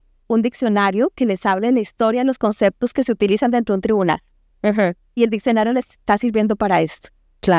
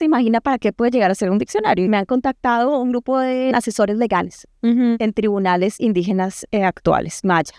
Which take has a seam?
second; 2 cuts; at 1.9 s, 3.5 s

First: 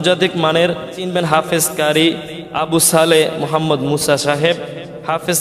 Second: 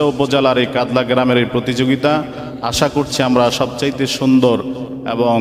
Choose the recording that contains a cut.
first; 1 cut; at 1.0 s

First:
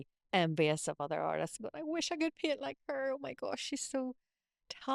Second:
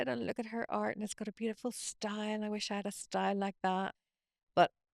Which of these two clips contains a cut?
second; 1 cut; at 4.1 s

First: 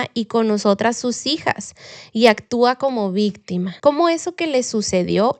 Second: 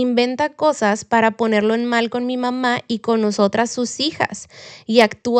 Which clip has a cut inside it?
first; 1 cut; at 3.7 s

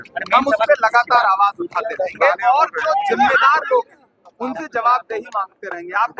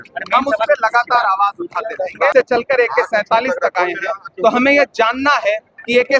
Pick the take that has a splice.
second; 1 cut; at 2.3 s

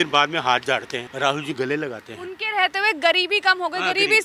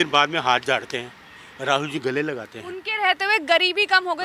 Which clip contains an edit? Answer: first; 1 cut; at 1.0 s

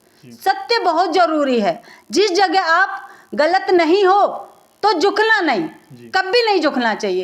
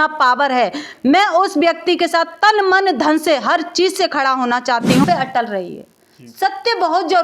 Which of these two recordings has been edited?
second; 1 cut; at 5.0 s

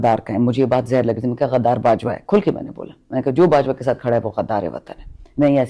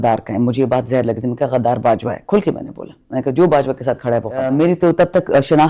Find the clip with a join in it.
second; 1 cut; at 4.4 s

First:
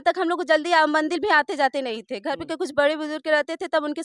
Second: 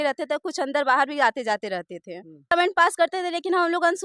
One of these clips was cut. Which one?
second; 1 cut; at 2.5 s

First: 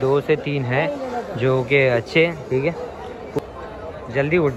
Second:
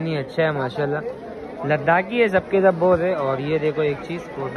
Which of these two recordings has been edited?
first; 1 cut; at 3.4 s

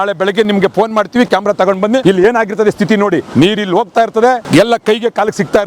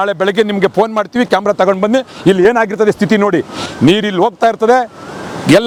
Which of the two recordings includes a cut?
first; 3 cuts; at 2.0 s, 3.3 s, 4.4 s

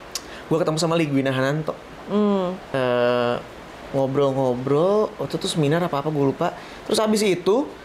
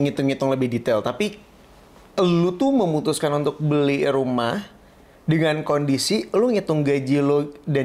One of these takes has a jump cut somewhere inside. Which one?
first; 1 cut; at 2.6 s

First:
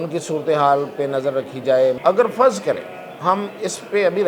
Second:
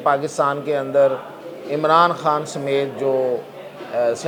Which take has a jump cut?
first; 1 cut; at 2.0 s

